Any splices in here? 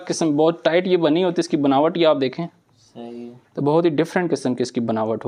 no; 0 cuts

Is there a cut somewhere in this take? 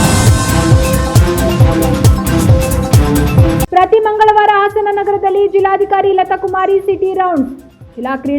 yes; 1 cut; at 3.7 s

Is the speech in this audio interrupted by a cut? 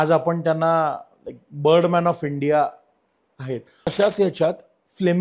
yes; 1 cut; at 3.9 s

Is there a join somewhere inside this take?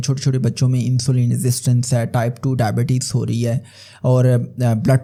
no; 0 cuts

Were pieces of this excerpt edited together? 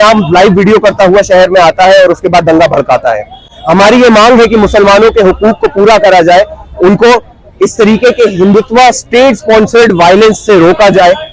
no; 0 cuts

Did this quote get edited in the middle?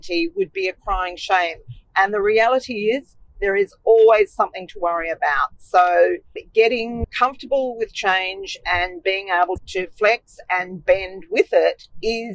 no; 0 cuts

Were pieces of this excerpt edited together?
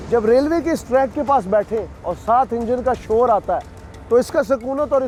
no; 0 cuts

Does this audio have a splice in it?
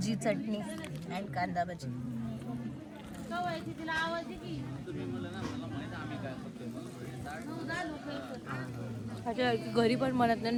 no; 0 cuts

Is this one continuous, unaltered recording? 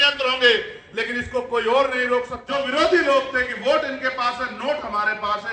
no; 1 cut; at 2.4 s

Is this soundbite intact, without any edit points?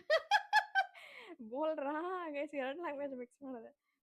yes; 0 cuts

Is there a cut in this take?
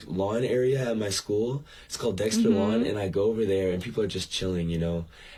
no; 0 cuts

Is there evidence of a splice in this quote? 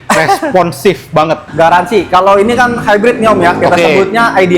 yes; 1 cut; at 1.5 s

